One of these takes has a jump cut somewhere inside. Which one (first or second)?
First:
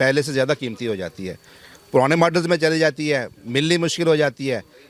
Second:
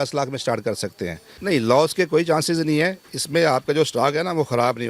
second